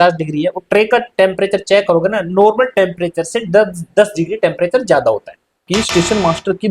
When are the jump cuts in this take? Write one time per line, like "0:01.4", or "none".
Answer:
0:05.7